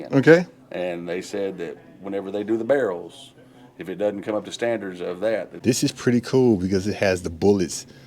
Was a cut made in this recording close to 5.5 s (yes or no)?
yes